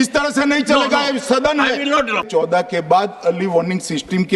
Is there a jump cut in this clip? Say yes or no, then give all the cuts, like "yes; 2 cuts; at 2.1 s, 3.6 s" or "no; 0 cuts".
yes; 1 cut; at 2.3 s